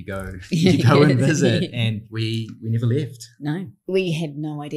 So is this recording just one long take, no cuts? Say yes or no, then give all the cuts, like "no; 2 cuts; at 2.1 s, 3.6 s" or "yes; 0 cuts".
no; 2 cuts; at 2.1 s, 3.9 s